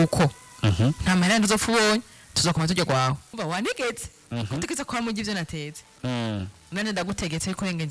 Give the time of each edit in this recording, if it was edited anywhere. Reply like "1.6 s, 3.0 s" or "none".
3.3 s

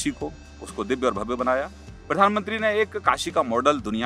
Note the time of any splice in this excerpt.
none

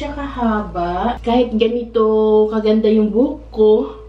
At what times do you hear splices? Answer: 1.2 s

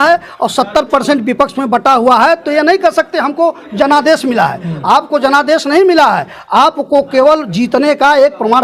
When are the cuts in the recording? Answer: none

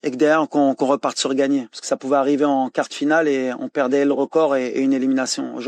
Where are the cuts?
none

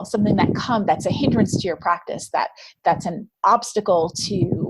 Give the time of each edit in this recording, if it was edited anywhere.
2.7 s

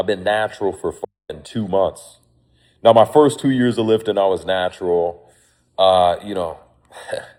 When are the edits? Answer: none

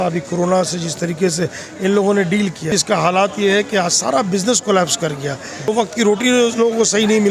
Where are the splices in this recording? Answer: 2.7 s, 5.7 s

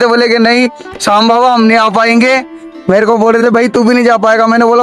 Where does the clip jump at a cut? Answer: none

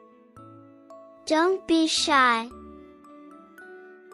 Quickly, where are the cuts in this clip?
2.5 s

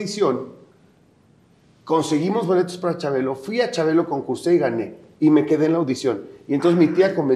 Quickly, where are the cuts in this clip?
none

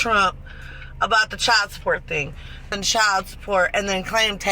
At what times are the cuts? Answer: 2.7 s

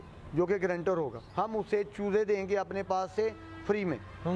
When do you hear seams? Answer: 1.2 s

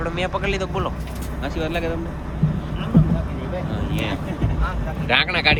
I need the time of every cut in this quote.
none

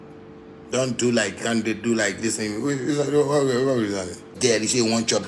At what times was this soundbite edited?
4.3 s

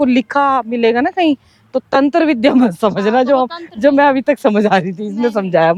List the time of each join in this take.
none

